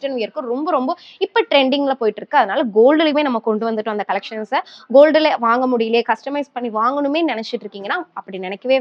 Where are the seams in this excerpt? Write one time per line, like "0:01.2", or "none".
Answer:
none